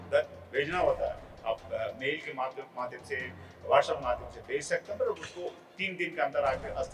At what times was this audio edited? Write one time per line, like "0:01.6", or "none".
none